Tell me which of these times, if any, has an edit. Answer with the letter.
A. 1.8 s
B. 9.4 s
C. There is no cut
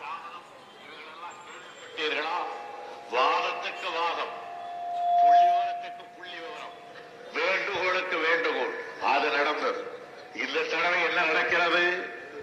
C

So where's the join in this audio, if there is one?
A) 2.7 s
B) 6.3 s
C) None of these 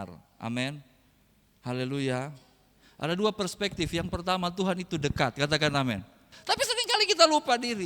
B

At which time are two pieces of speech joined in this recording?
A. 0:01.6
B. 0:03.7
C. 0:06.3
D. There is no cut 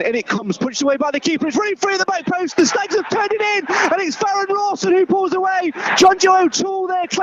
D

